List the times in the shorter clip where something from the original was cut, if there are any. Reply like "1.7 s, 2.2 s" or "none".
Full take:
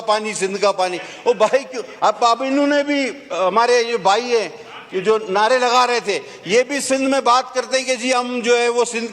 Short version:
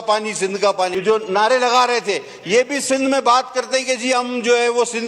1.0 s

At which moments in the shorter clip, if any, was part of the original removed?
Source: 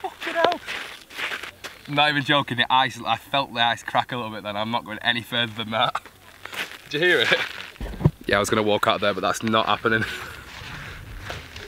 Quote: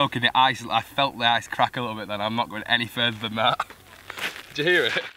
none

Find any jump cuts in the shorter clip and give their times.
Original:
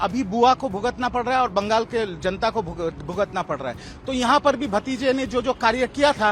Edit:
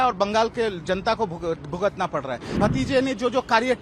2.5 s

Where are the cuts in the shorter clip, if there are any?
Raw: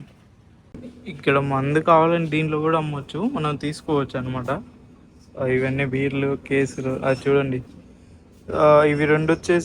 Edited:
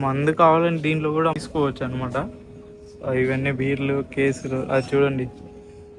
1.4 s

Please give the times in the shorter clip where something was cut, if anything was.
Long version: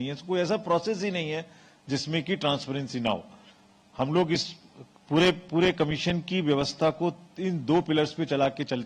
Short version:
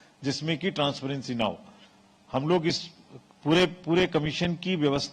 none

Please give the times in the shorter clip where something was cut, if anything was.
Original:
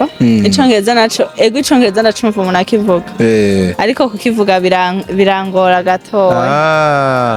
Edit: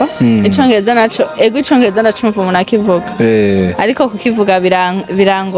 none

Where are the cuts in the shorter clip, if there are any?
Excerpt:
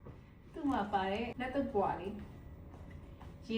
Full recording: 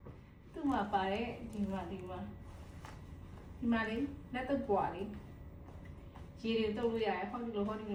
1.3 s

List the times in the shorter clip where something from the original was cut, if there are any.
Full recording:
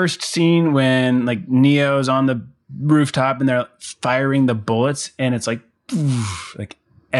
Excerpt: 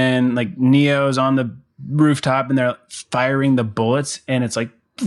none

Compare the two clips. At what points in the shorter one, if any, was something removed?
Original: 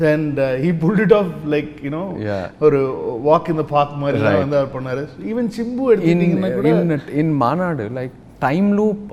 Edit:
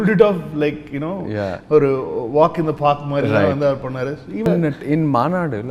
4.5 s

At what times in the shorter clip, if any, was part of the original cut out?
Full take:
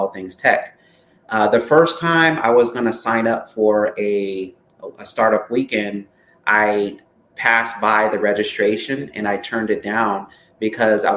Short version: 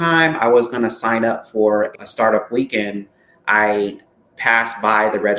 1.9 s

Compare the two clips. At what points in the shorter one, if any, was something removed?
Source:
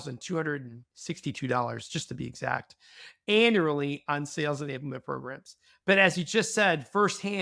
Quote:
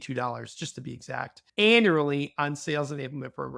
1.4 s

